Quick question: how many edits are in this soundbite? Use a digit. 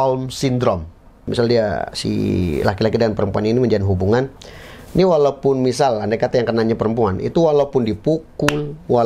1